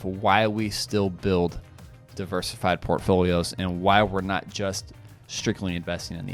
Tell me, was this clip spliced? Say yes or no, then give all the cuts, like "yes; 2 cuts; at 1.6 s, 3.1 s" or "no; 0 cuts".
no; 0 cuts